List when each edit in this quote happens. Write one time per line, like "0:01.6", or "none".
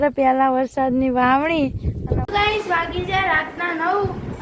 0:02.2